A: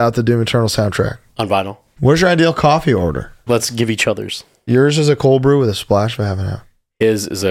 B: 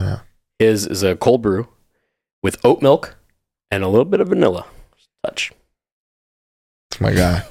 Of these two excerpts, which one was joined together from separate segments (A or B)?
A